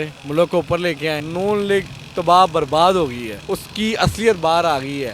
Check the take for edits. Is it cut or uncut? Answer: cut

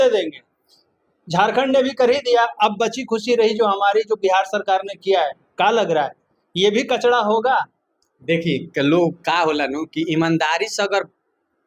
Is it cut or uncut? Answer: uncut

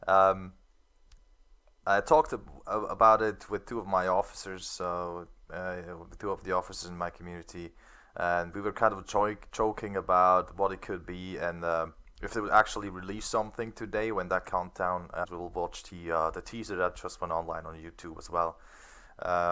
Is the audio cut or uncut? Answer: uncut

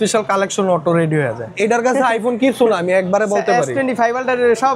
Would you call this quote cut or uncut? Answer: cut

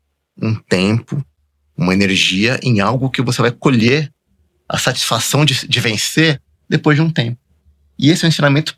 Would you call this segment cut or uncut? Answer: uncut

